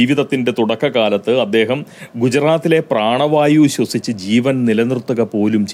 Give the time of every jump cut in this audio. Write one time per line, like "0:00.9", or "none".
none